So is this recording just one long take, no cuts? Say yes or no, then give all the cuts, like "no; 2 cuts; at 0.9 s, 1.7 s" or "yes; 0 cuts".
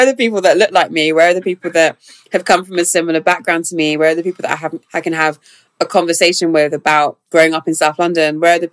no; 1 cut; at 7.2 s